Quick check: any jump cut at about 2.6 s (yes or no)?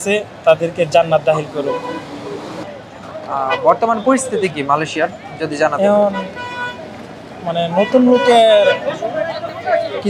yes